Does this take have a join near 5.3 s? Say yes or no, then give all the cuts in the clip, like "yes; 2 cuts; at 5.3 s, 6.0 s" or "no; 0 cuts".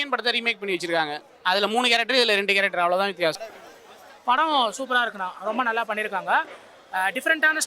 no; 1 cut; at 3.4 s